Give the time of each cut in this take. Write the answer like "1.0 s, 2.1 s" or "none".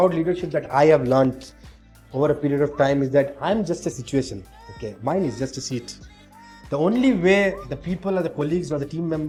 none